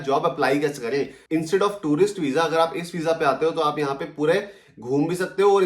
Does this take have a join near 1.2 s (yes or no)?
yes